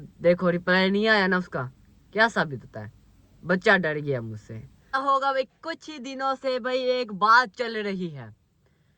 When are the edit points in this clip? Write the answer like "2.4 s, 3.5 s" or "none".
4.9 s

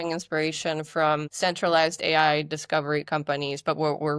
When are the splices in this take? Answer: 1.3 s

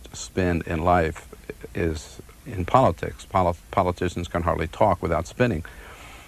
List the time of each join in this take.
2.7 s

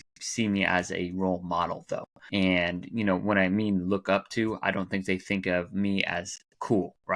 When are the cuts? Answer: 2.1 s

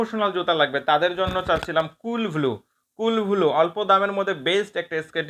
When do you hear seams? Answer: none

